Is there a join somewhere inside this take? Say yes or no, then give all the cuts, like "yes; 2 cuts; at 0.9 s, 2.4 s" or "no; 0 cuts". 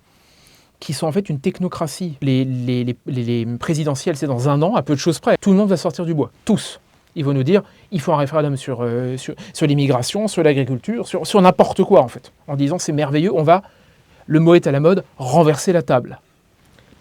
yes; 2 cuts; at 2.2 s, 5.4 s